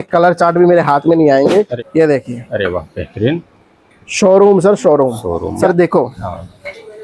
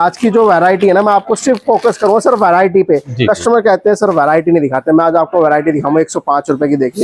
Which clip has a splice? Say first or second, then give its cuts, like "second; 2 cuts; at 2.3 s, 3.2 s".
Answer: first; 2 cuts; at 1.8 s, 5.5 s